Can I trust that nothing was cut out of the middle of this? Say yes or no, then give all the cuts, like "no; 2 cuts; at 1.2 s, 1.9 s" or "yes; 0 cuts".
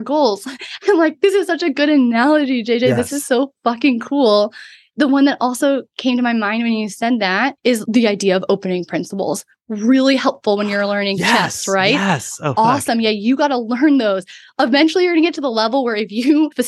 yes; 0 cuts